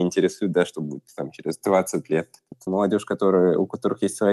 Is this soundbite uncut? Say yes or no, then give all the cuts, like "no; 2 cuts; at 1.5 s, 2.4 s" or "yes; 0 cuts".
no; 1 cut; at 2.4 s